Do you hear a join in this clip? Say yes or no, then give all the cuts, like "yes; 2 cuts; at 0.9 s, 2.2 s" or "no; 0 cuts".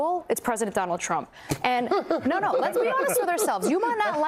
no; 0 cuts